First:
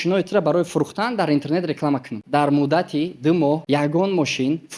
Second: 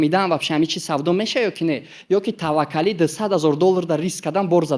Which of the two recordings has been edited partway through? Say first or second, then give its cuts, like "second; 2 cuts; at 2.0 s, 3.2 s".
first; 2 cuts; at 2.1 s, 3.6 s